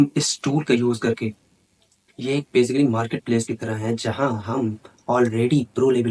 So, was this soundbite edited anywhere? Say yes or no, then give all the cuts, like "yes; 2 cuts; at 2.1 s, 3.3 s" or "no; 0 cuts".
no; 0 cuts